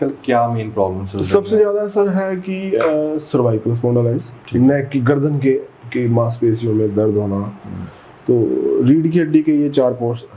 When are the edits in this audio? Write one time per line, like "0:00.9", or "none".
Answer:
none